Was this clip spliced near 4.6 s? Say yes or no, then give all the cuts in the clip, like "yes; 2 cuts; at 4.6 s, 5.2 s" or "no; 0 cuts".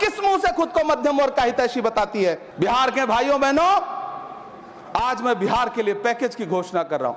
no; 1 cut; at 2.5 s